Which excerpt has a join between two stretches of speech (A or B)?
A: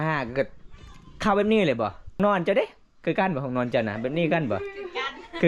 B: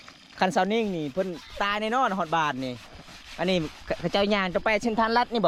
A